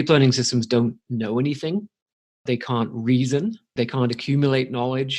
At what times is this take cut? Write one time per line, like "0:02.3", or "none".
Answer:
0:02.4
0:03.7